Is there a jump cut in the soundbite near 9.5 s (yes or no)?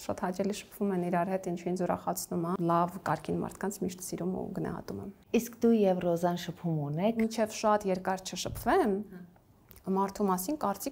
no